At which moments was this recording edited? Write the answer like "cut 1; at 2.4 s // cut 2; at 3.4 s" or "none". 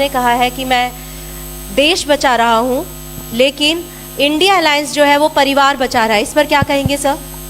none